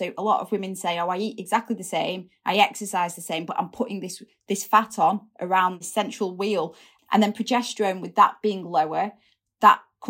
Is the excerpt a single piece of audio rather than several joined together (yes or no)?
no